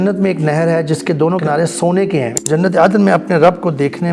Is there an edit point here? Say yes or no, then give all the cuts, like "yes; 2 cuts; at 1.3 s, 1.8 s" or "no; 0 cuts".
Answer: yes; 2 cuts; at 1.4 s, 2.4 s